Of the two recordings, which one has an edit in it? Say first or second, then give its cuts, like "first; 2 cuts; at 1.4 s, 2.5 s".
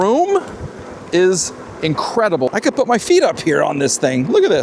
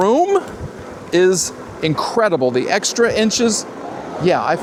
first; 1 cut; at 2.5 s